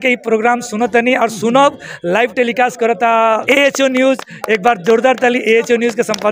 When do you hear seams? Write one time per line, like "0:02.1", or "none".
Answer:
0:03.4

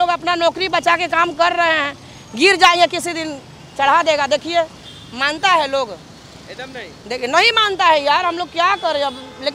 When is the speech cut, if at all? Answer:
none

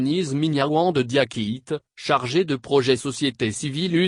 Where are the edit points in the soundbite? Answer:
none

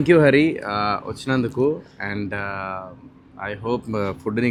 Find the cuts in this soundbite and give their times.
none

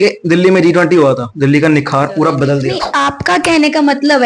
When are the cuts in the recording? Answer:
0:01.3
0:02.8

